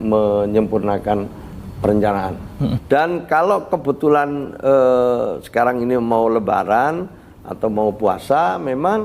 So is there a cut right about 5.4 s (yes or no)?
no